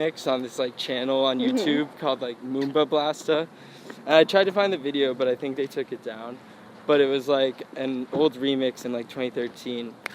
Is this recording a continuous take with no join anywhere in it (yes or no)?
yes